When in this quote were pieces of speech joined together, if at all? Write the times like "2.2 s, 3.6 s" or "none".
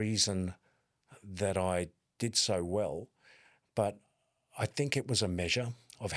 none

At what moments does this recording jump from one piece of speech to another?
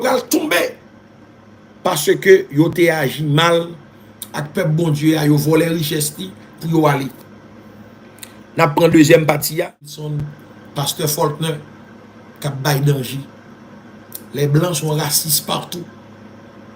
10.1 s

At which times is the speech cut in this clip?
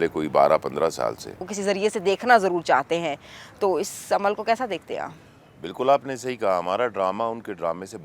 1.5 s

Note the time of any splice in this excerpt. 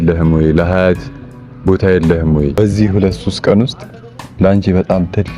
2.6 s

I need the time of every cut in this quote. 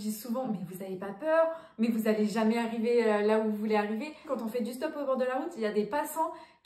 4.2 s

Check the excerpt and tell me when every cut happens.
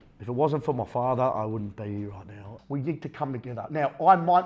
2.5 s

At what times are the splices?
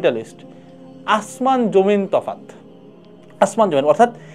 none

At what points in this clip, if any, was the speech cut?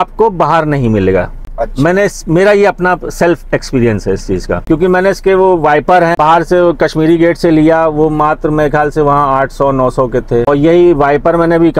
none

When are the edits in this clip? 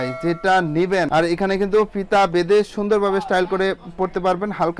1.1 s

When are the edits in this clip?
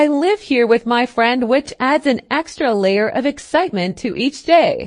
1.5 s

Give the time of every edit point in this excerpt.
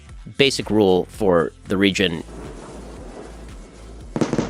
none

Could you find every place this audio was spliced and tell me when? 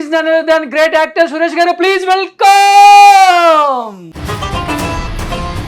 4.1 s

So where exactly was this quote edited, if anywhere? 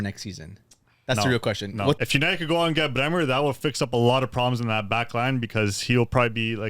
2.0 s

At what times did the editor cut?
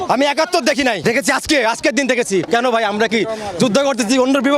1.0 s, 2.5 s

